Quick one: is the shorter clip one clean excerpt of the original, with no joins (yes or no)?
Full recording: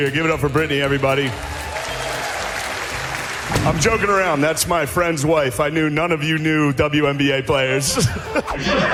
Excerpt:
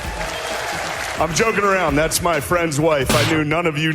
no